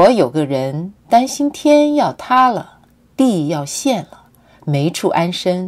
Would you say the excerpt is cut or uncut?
uncut